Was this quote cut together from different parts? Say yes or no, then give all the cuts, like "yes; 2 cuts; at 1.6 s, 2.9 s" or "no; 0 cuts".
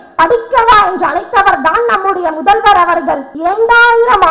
yes; 1 cut; at 3.3 s